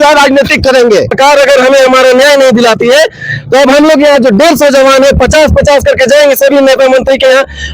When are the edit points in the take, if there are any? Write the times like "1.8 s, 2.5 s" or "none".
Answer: 1.1 s